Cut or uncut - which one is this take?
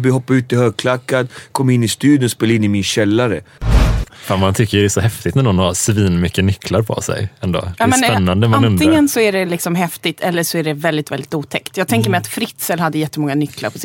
cut